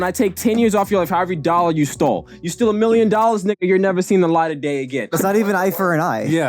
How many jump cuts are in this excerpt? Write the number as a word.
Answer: one